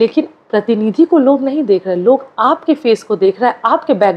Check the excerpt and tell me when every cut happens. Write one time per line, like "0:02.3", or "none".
none